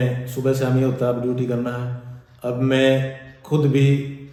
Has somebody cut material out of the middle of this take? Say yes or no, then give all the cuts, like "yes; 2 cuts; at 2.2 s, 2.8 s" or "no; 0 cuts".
no; 0 cuts